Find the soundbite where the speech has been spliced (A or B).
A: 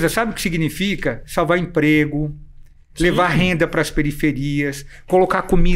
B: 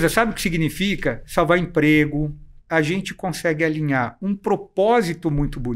B